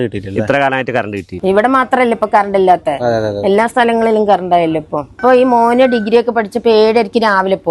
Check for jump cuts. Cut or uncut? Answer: cut